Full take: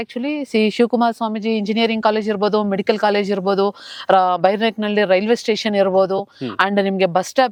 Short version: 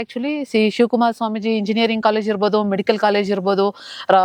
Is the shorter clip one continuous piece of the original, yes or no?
yes